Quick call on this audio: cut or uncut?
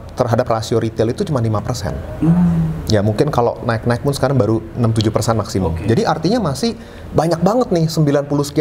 uncut